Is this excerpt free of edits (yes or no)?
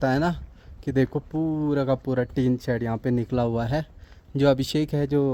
yes